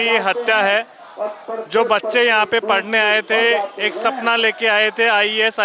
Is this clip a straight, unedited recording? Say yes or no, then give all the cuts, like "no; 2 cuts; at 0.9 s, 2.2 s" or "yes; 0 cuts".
yes; 0 cuts